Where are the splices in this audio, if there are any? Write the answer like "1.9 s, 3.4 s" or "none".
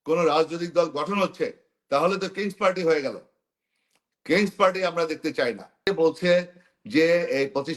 5.9 s